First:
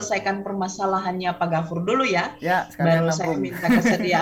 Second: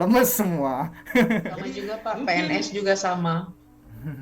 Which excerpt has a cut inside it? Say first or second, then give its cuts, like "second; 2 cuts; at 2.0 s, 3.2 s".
second; 1 cut; at 2.0 s